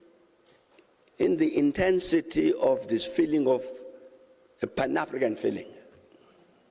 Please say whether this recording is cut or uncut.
uncut